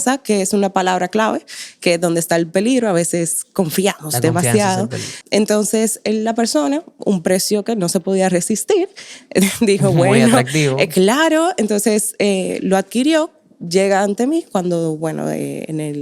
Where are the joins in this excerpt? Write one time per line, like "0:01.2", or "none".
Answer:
0:05.1